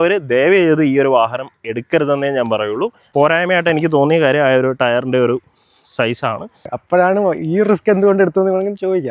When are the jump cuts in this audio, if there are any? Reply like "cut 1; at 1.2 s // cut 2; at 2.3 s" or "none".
cut 1; at 3.0 s // cut 2; at 6.7 s